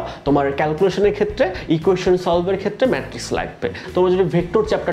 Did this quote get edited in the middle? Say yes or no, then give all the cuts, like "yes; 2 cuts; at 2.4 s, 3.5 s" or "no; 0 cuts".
yes; 1 cut; at 3.8 s